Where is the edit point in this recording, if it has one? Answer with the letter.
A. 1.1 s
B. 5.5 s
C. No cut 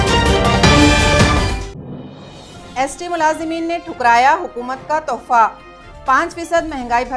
A